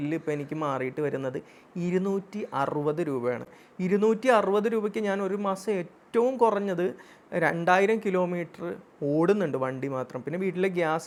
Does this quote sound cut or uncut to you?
uncut